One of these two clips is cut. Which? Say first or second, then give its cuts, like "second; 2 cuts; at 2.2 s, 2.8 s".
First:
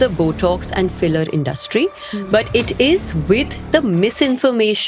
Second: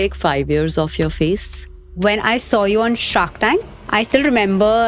second; 1 cut; at 1.8 s